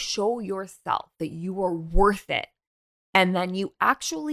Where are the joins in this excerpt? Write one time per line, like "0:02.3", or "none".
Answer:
none